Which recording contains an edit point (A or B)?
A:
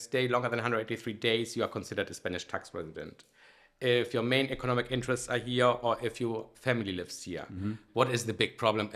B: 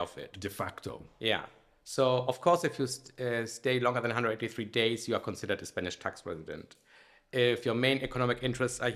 A